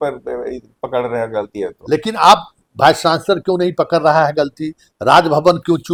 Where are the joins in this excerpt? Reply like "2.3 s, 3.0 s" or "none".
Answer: none